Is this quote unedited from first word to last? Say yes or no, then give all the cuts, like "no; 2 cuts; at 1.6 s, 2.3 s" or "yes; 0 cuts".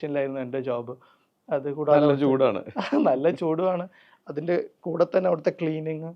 yes; 0 cuts